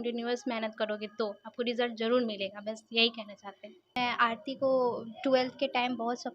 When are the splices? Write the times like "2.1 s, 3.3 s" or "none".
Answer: 3.9 s